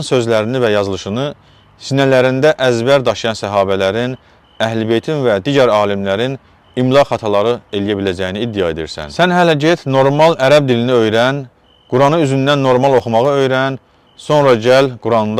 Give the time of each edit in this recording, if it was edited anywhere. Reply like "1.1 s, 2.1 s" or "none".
none